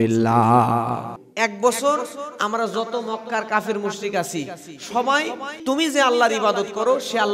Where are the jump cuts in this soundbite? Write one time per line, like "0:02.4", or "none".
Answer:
0:01.2
0:05.6